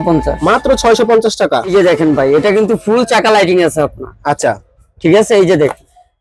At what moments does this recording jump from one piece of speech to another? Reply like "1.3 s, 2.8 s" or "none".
1.6 s